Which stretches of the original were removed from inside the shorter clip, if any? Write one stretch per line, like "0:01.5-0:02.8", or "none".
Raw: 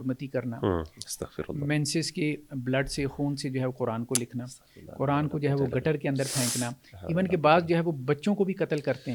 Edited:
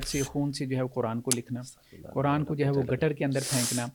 none